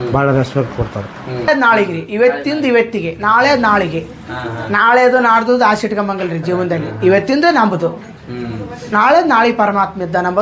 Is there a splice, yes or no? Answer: yes